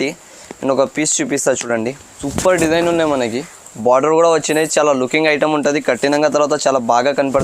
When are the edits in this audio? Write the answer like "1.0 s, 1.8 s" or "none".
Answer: 2.1 s

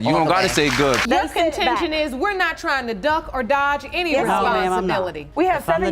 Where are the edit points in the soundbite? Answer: 1.0 s

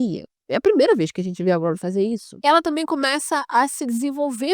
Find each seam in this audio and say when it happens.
none

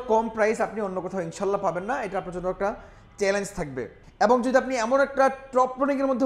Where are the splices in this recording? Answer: 3.9 s

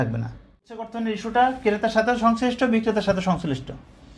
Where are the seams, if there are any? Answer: 0.9 s

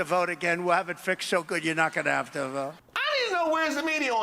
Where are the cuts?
2.9 s

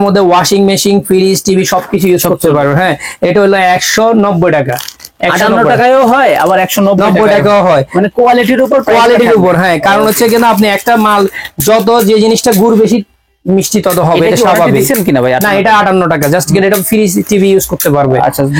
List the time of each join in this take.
none

